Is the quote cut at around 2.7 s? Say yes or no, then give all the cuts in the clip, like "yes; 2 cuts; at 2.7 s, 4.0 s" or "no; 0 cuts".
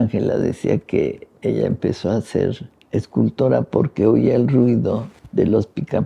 yes; 2 cuts; at 2.7 s, 5.1 s